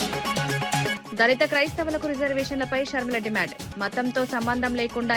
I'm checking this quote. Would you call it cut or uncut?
cut